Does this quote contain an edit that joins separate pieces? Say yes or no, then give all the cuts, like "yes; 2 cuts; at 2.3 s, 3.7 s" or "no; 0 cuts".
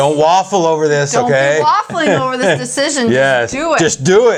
no; 0 cuts